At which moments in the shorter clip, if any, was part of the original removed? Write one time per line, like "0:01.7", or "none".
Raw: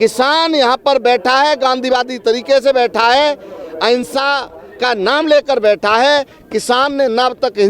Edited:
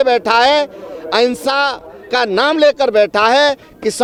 none